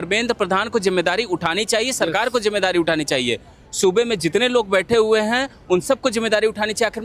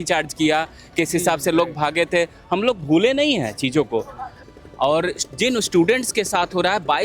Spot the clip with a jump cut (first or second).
second